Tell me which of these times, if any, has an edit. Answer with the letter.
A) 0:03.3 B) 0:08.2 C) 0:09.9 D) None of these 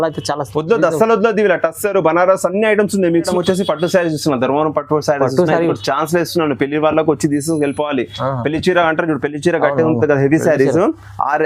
A